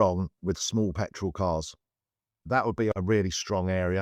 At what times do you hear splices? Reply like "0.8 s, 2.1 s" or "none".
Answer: none